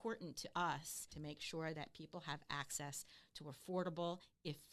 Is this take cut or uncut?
cut